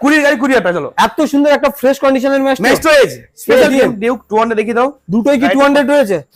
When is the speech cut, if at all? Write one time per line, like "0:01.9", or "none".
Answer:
0:03.7

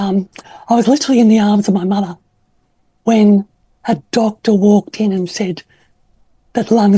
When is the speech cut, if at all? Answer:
none

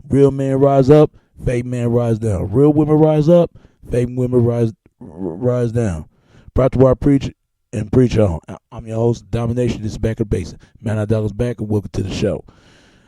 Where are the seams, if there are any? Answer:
none

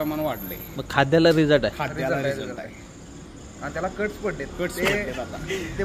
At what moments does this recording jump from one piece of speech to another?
none

